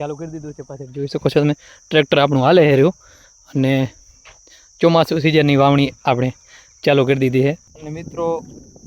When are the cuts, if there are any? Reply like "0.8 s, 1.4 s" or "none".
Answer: 7.7 s